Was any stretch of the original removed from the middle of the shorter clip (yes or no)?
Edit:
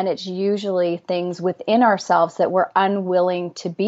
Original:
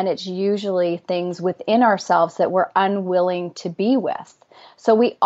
no